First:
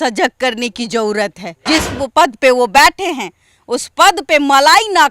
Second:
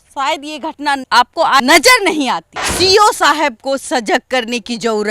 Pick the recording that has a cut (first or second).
second